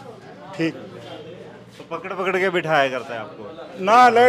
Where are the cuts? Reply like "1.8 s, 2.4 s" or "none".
none

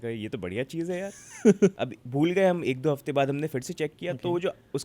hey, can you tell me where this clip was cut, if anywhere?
1.7 s

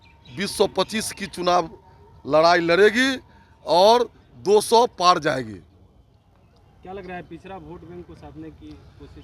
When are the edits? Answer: none

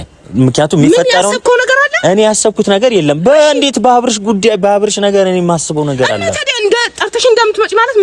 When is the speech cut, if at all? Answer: none

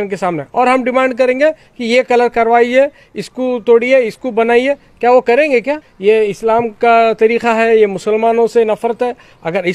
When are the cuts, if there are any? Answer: 5.9 s

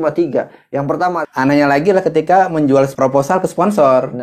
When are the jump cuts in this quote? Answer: 1.2 s, 2.9 s

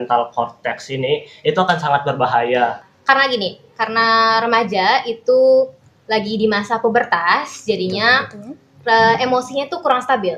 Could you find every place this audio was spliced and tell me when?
2.9 s

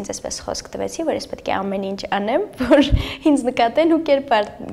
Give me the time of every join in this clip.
none

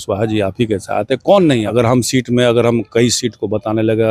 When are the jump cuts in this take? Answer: 1.7 s

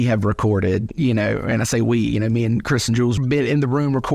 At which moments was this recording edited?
3.2 s

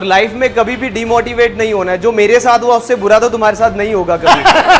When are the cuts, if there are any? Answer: none

